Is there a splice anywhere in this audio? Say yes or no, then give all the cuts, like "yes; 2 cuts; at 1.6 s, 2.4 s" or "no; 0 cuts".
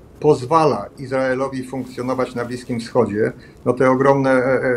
no; 0 cuts